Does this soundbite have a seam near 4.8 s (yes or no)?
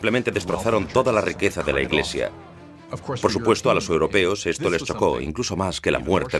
yes